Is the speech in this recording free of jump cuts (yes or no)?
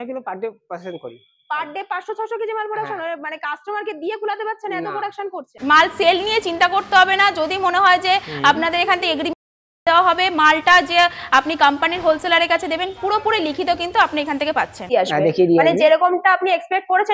no